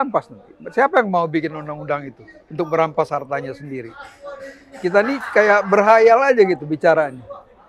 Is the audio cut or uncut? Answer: uncut